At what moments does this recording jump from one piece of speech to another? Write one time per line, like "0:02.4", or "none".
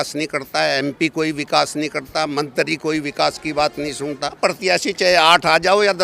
0:04.4